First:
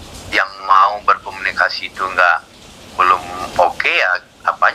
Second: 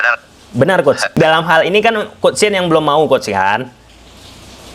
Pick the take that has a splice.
second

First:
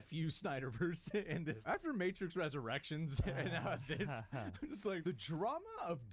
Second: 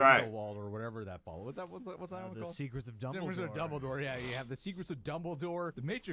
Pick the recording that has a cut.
first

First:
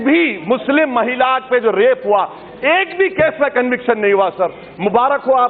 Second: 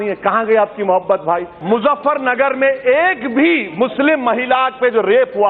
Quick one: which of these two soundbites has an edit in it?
second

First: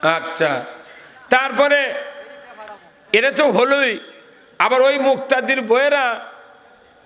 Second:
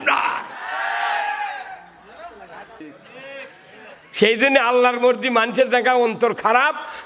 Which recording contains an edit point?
second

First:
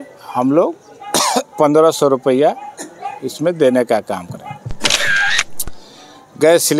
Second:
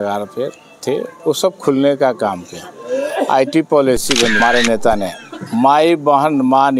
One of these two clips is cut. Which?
second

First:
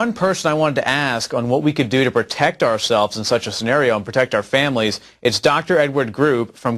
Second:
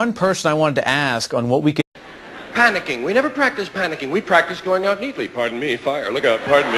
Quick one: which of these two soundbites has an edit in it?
first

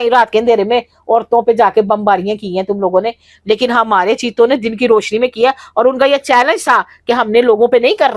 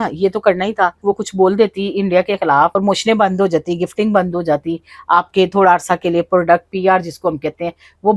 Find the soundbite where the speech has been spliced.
second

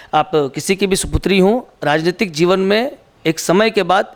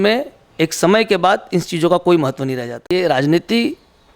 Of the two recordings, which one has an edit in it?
second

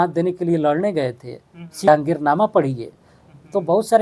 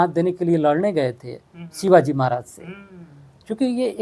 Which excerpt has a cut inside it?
first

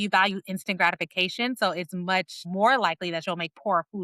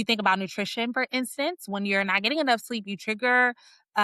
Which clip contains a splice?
first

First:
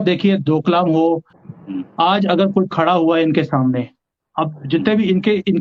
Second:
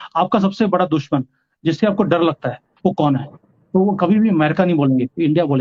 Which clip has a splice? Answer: first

